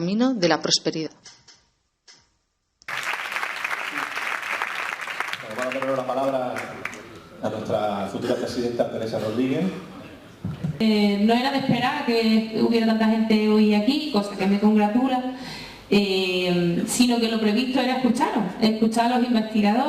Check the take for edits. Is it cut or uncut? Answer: cut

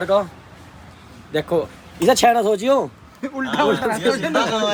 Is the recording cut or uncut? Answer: uncut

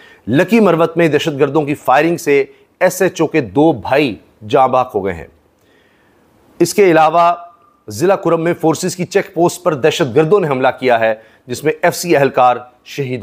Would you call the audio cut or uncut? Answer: uncut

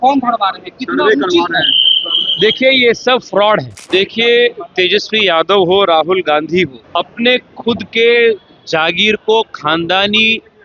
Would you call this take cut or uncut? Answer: cut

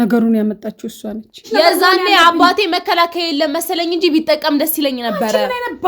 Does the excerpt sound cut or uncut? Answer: cut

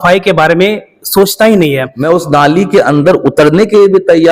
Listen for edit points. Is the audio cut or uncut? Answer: cut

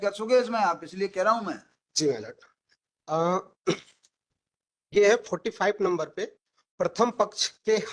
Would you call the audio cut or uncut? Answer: uncut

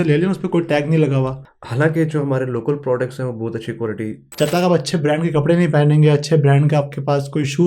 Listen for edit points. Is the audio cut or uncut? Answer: cut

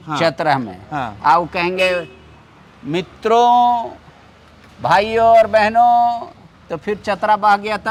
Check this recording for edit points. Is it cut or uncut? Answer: uncut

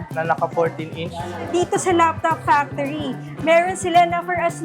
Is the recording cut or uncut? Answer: cut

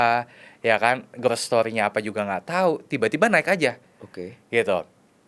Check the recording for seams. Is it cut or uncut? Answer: uncut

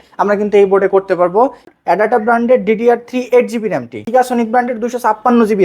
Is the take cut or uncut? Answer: cut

